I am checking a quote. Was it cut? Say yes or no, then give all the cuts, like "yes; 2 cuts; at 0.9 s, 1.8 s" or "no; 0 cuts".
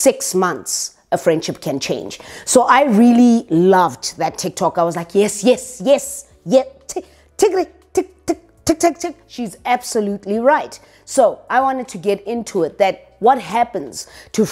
no; 0 cuts